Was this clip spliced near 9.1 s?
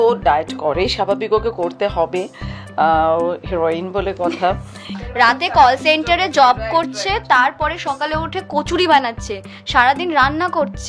no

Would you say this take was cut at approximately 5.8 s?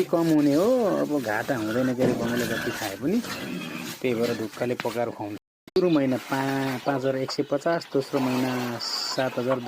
yes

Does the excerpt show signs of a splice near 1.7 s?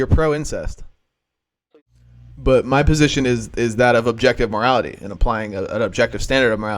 yes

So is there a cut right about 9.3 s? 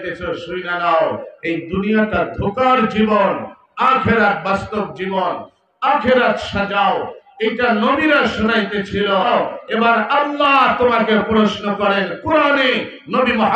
yes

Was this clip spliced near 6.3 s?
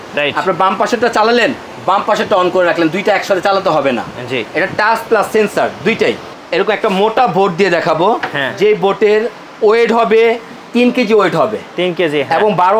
yes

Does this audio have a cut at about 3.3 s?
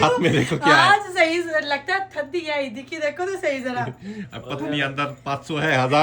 no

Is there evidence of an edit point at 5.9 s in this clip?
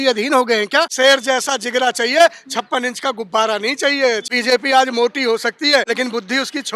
yes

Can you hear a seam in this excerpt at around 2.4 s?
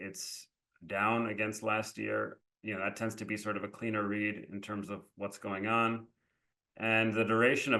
yes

